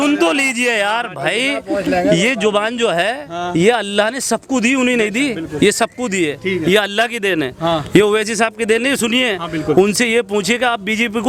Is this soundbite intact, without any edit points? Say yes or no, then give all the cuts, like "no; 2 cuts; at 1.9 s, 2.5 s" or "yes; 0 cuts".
yes; 0 cuts